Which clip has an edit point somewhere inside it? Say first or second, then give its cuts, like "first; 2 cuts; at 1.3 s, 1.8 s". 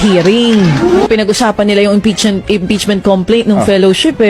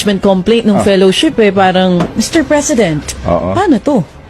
first; 1 cut; at 1.1 s